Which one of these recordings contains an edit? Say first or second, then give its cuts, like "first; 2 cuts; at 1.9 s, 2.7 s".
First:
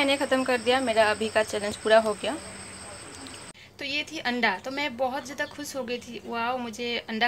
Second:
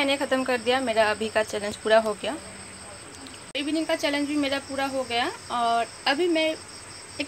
first; 1 cut; at 3.3 s